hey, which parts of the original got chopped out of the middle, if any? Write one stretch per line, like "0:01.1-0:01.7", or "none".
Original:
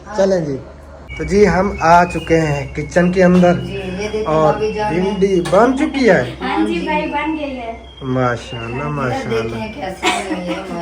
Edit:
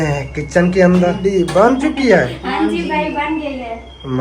0:03.6-0:05.1